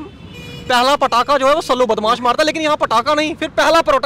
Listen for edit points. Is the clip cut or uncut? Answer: uncut